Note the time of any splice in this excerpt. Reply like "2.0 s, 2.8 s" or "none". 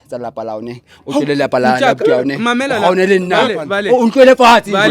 none